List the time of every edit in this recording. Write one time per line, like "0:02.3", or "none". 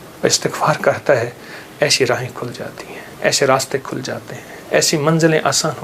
none